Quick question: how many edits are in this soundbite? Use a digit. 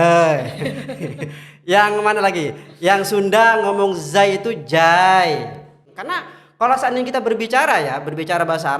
1